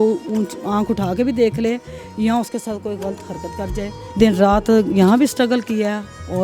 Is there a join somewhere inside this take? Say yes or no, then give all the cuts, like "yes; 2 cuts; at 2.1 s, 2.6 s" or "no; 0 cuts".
yes; 1 cut; at 4.0 s